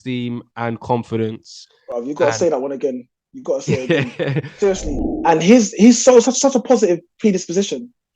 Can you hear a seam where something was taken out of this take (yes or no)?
yes